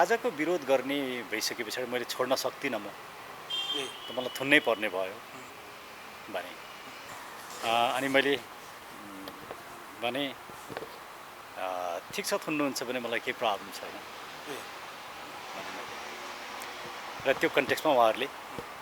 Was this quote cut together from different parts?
no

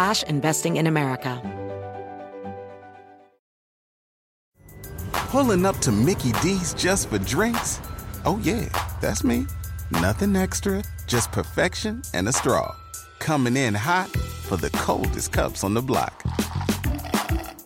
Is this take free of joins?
no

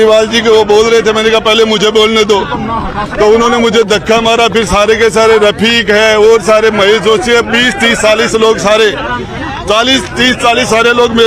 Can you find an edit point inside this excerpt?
no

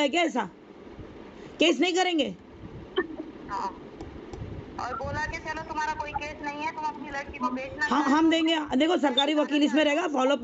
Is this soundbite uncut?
yes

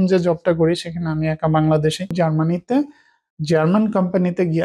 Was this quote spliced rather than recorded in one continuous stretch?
yes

